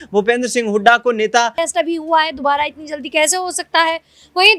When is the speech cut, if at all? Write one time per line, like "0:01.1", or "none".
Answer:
0:01.5